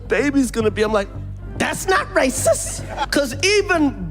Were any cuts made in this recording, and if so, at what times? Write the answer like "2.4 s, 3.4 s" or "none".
3.0 s